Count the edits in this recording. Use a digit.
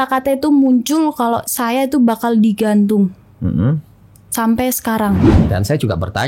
1